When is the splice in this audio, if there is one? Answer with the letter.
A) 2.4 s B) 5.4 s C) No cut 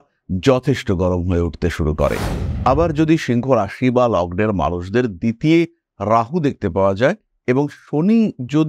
A